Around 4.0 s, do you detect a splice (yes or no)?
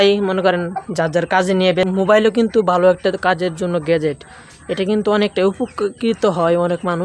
no